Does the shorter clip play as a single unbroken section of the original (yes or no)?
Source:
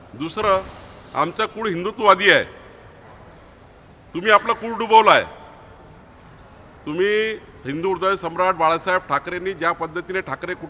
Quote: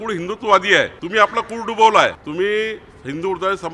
no